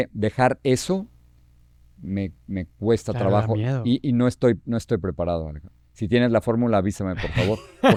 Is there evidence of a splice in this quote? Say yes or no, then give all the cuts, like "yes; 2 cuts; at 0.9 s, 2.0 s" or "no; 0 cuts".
no; 0 cuts